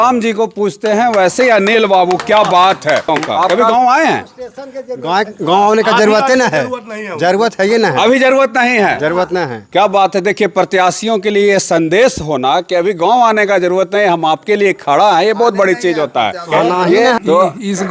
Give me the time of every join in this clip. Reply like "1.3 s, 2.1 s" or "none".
3.5 s, 17.1 s